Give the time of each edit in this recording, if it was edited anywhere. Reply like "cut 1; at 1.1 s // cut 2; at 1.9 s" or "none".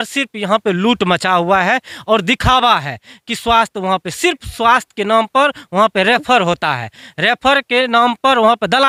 none